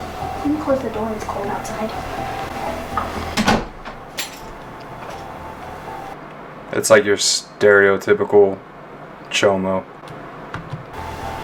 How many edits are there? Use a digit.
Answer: 0